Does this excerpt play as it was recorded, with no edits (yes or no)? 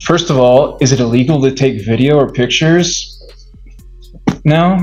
yes